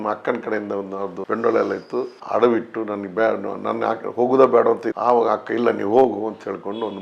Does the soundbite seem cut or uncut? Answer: uncut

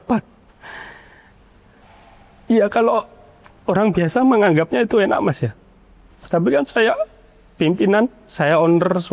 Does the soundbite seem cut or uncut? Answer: uncut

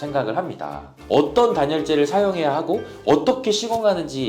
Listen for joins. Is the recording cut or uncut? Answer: cut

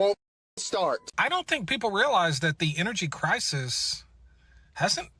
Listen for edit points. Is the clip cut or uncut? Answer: cut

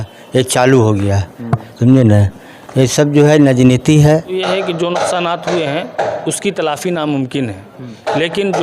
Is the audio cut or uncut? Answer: cut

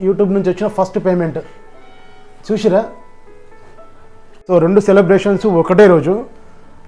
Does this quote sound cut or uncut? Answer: cut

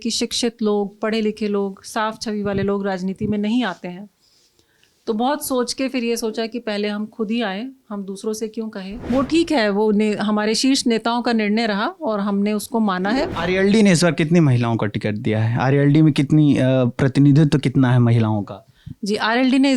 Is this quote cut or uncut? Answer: cut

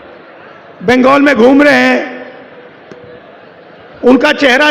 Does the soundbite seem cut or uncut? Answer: uncut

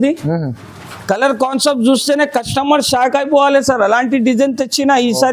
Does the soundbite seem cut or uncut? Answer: uncut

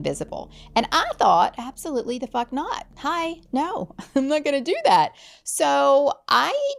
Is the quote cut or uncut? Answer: uncut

